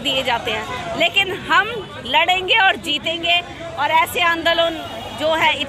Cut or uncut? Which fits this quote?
uncut